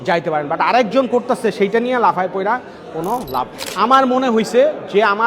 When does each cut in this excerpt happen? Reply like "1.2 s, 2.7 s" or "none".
3.6 s